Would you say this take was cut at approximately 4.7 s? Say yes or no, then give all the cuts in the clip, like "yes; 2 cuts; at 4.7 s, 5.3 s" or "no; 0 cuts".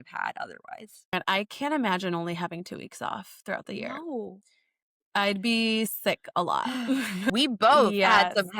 yes; 3 cuts; at 1.1 s, 4.7 s, 7.3 s